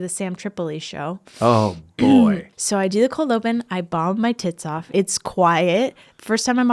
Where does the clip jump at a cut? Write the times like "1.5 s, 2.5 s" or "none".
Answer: 2.5 s, 4.9 s